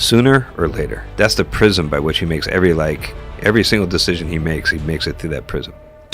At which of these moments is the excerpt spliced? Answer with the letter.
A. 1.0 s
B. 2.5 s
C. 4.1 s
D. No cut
A